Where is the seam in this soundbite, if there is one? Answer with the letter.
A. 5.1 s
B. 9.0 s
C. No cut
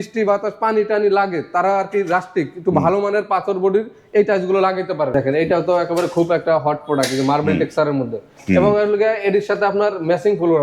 A